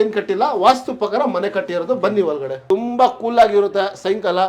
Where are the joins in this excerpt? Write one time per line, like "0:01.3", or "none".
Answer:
0:02.5